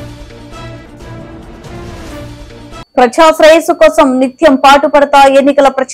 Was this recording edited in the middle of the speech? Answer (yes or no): no